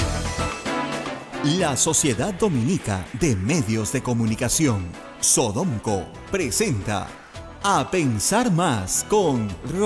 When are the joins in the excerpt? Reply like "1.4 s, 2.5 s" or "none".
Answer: 0.9 s